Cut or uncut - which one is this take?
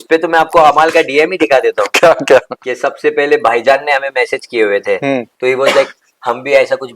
cut